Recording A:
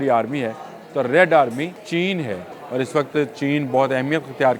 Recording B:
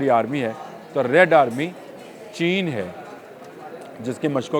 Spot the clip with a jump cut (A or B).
A